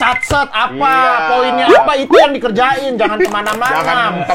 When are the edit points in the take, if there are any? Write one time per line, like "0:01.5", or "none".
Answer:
none

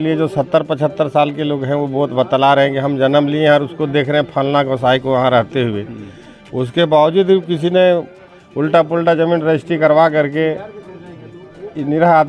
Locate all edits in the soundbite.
none

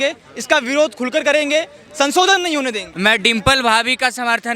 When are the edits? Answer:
0:02.8

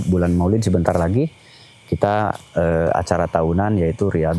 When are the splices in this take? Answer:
none

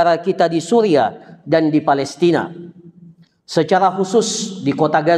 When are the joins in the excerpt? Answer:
none

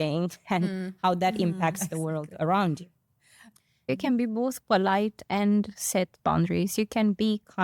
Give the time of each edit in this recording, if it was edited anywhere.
0:03.9

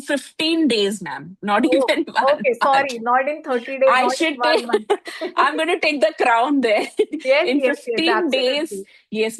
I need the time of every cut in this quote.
none

